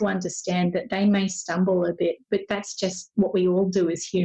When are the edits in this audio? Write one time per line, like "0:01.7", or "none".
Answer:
none